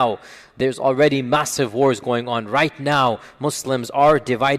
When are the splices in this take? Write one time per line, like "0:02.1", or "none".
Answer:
none